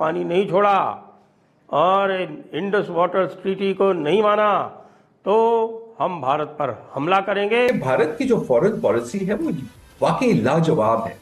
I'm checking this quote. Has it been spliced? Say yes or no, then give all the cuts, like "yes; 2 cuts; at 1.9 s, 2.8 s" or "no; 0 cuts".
yes; 1 cut; at 7.7 s